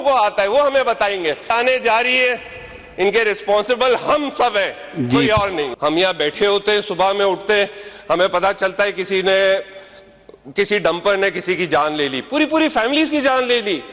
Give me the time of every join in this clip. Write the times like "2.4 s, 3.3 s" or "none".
1.5 s, 5.7 s